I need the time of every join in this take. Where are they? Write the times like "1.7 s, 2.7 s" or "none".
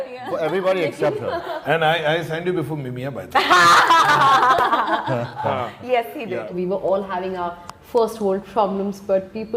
1.6 s, 6.5 s

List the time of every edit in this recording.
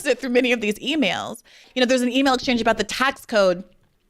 1.6 s

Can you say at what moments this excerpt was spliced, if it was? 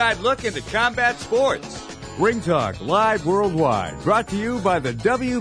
2.0 s

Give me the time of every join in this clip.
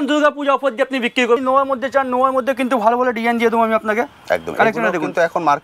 1.4 s

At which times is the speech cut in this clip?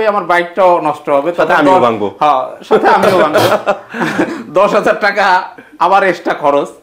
none

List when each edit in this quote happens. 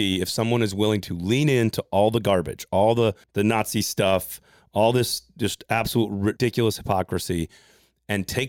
3.2 s, 6.4 s

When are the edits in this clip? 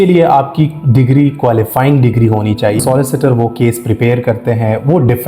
2.8 s

